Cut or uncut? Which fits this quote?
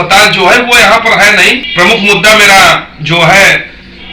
cut